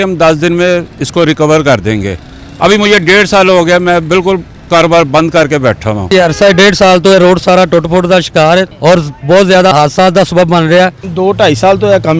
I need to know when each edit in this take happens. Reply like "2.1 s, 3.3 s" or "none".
6.0 s, 9.7 s, 11.0 s